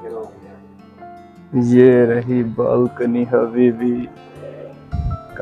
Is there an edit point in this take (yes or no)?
no